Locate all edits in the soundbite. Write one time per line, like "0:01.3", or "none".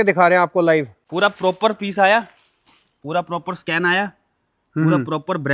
0:01.0